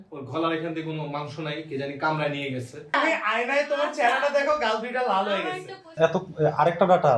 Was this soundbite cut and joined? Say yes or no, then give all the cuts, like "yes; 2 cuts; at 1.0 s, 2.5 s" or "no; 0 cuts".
yes; 2 cuts; at 2.9 s, 5.9 s